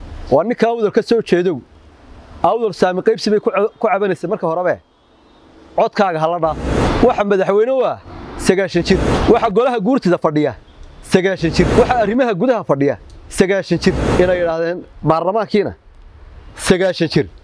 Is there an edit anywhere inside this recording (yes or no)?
yes